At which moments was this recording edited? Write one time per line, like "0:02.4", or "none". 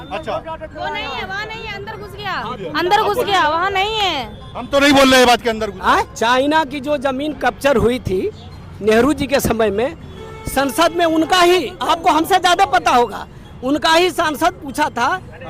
0:06.1

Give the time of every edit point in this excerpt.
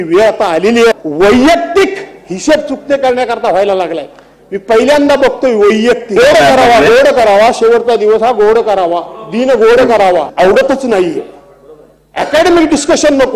0:00.9
0:06.2
0:10.3

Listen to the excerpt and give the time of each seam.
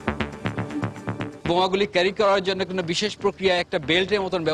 0:01.4

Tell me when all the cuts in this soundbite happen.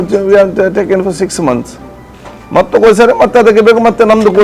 none

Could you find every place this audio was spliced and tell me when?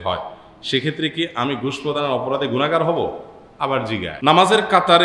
0:04.1

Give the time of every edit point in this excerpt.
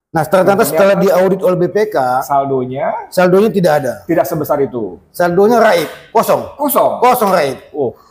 none

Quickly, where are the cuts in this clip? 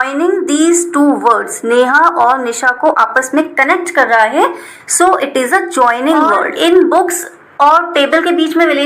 0:06.5

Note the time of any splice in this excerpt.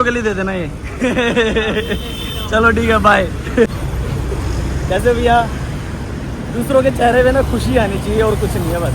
none

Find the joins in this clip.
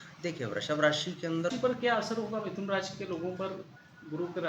0:01.5

